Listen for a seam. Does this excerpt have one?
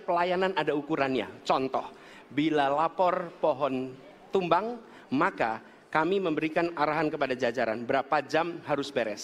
no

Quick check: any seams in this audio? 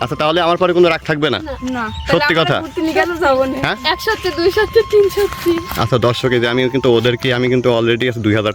no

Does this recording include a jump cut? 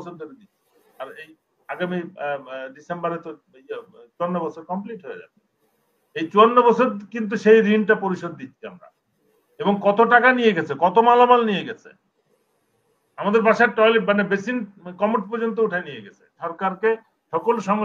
yes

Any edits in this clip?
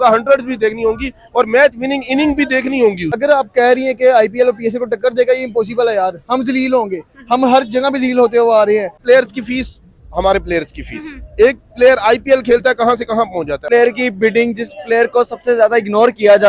yes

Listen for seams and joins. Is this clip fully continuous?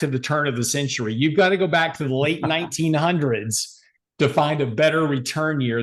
yes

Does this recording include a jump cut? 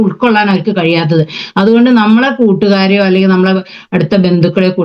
no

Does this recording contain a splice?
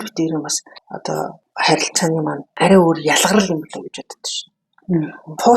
yes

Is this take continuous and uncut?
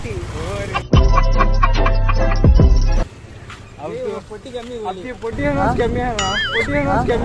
yes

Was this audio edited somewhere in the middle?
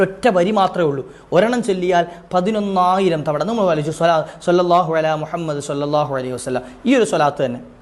no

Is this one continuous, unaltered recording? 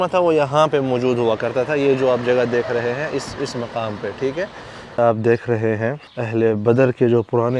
no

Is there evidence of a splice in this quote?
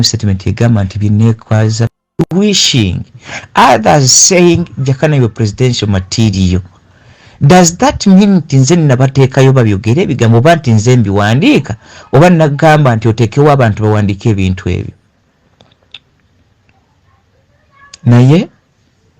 yes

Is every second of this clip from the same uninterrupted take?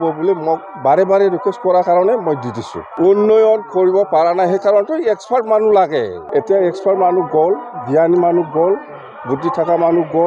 no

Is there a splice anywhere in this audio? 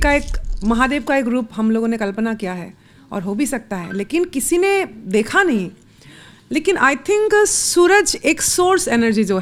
no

